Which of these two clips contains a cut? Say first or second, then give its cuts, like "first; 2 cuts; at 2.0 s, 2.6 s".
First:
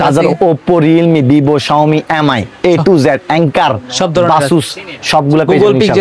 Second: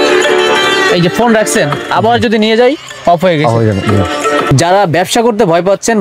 second; 1 cut; at 4.5 s